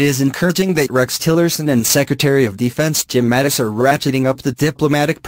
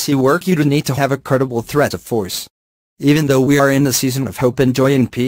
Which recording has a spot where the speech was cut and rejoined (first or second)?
second